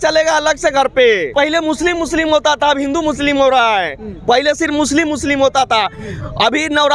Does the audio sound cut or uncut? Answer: cut